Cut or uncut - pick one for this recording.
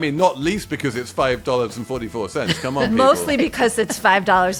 uncut